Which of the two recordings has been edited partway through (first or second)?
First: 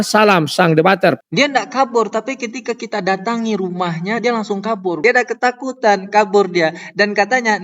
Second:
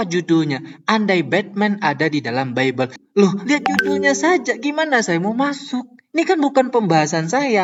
first